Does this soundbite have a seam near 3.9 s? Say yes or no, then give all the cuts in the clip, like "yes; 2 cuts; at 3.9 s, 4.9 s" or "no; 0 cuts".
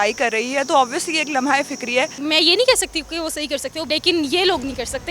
yes; 2 cuts; at 2.2 s, 3.9 s